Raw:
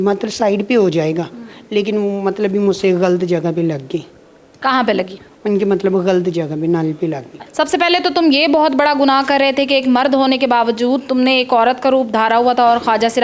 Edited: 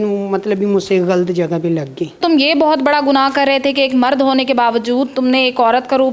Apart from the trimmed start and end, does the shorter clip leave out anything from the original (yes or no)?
yes